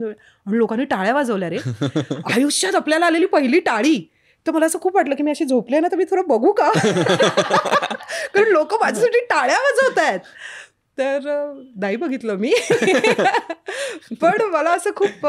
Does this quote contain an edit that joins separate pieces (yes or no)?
no